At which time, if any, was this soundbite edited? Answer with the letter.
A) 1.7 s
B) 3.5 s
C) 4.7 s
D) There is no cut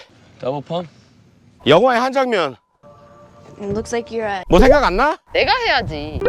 D